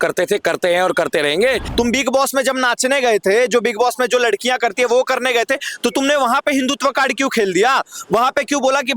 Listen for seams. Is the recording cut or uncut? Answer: cut